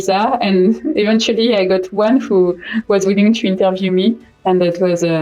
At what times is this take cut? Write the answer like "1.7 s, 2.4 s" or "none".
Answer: none